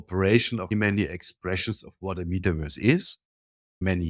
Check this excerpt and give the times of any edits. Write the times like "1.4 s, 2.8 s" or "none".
none